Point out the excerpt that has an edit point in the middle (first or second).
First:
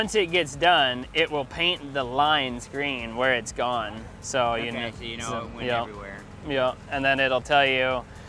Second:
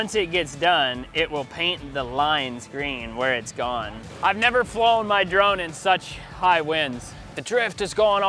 second